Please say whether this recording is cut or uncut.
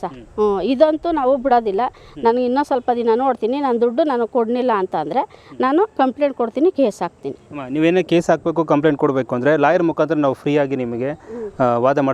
uncut